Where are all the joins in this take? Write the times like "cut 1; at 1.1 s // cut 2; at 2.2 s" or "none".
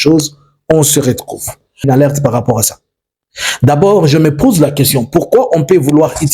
cut 1; at 1.8 s